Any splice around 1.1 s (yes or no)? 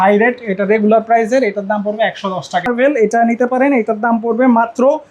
no